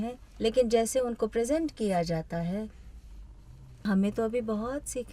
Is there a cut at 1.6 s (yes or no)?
no